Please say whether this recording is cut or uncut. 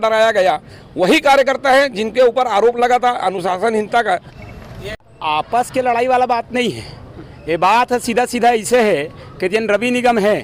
cut